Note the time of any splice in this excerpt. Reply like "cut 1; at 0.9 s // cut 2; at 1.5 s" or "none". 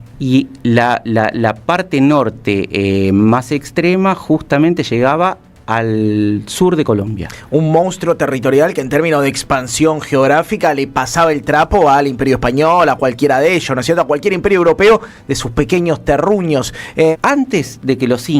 cut 1; at 17.2 s